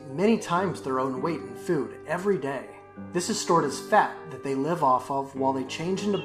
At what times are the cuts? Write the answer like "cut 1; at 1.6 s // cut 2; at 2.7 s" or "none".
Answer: none

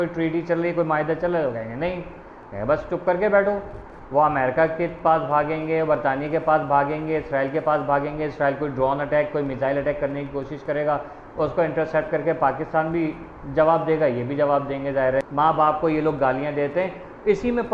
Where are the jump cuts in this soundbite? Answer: cut 1; at 15.3 s

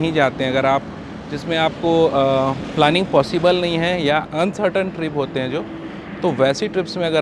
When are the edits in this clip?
none

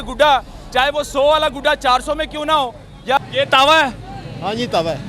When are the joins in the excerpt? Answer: cut 1; at 3.2 s

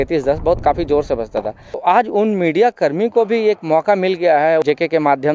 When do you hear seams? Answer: cut 1; at 1.7 s // cut 2; at 4.6 s

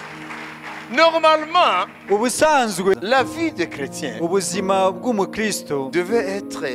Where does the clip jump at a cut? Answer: cut 1; at 2.9 s

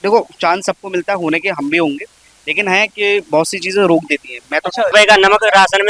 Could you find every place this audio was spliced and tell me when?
cut 1; at 4.9 s

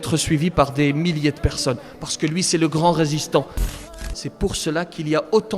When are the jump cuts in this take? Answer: cut 1; at 3.6 s

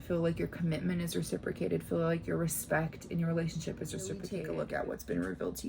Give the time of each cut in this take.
cut 1; at 4.4 s

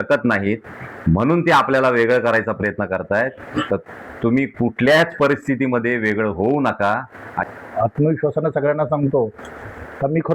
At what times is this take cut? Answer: cut 1; at 7.5 s

